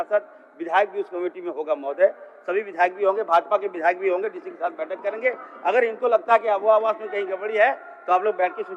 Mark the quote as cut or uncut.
uncut